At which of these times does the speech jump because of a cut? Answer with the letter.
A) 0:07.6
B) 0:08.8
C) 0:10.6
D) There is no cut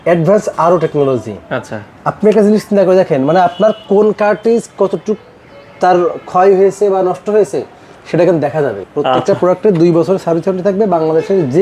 B